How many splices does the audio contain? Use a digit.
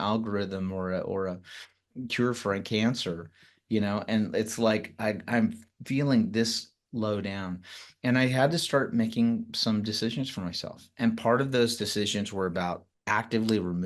1